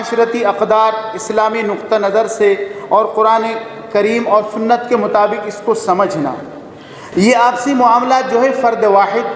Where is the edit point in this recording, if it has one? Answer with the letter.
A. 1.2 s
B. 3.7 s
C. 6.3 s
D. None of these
D